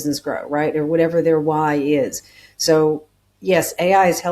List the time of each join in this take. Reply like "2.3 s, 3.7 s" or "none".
none